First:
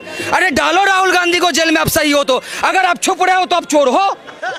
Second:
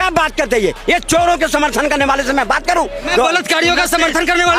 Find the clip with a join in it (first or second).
second